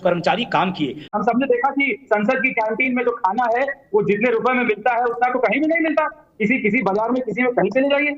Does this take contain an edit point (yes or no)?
yes